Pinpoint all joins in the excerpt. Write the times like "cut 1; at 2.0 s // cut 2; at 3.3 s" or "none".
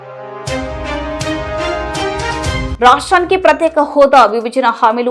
cut 1; at 2.7 s